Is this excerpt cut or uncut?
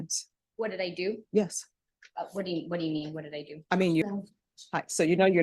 cut